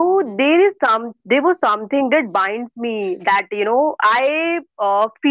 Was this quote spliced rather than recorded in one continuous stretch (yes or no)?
no